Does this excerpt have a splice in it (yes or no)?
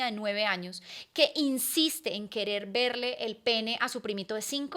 no